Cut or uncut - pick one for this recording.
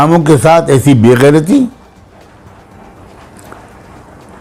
uncut